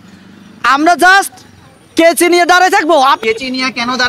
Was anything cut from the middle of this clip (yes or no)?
yes